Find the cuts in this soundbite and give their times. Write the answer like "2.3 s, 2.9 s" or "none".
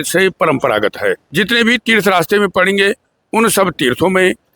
1.2 s